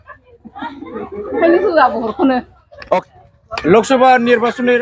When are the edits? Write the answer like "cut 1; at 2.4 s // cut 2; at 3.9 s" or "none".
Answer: cut 1; at 3.0 s

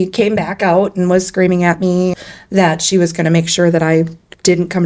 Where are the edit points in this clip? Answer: cut 1; at 2.1 s

